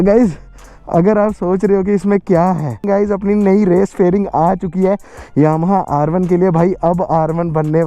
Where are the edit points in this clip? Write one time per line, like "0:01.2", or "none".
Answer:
0:02.8